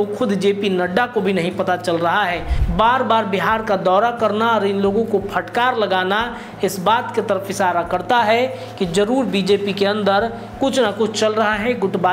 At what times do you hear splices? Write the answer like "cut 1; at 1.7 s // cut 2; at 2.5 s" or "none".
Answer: cut 1; at 2.5 s